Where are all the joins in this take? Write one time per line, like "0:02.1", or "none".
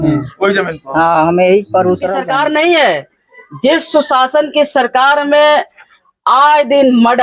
0:02.1